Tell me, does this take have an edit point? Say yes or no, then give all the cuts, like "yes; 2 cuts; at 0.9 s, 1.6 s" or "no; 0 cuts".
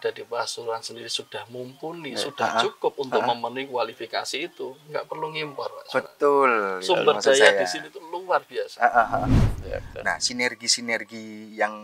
yes; 1 cut; at 9.3 s